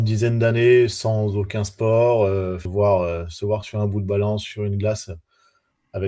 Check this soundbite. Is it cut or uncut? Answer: cut